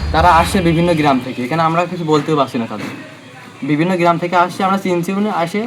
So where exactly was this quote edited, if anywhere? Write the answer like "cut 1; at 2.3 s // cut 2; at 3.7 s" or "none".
none